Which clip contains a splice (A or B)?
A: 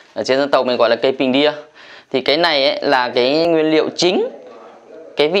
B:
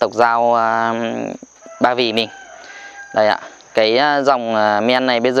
A